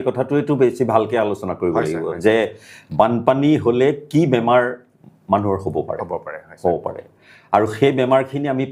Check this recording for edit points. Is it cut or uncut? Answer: uncut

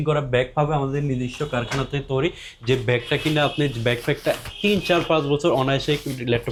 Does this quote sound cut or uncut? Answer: uncut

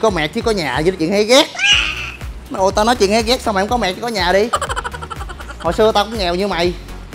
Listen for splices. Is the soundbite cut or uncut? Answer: uncut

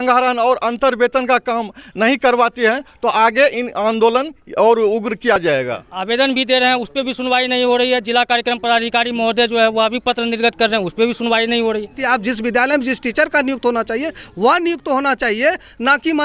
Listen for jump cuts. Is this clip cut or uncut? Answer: cut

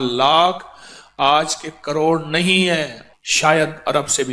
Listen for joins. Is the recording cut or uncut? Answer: cut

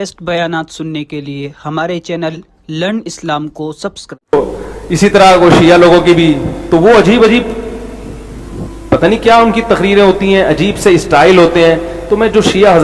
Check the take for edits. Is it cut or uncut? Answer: cut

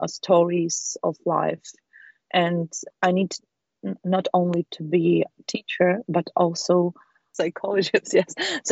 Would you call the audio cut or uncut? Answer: cut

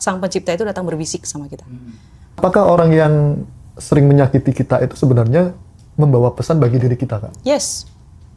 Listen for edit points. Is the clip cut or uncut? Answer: cut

